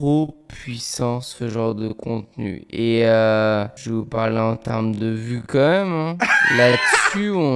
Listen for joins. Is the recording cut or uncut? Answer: cut